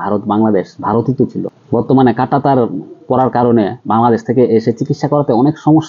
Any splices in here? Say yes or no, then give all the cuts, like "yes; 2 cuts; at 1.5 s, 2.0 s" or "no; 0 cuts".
yes; 1 cut; at 1.5 s